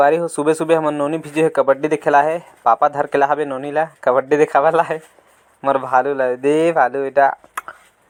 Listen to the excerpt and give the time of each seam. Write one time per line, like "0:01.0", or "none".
none